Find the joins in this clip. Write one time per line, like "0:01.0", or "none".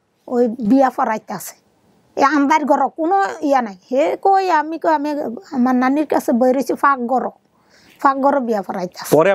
none

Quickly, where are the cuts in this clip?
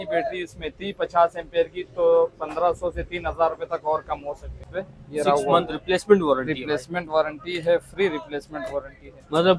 0:04.6

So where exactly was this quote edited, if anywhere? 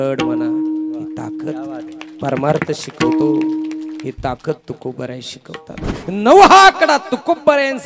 0:06.0

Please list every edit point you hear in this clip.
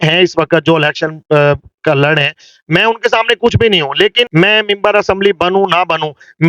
0:04.2

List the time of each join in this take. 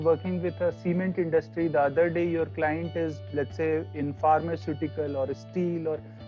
none

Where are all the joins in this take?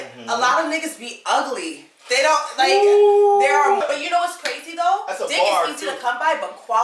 0:03.8

